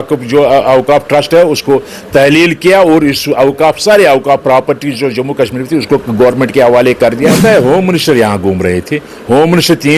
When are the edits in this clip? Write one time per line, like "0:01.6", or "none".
0:07.0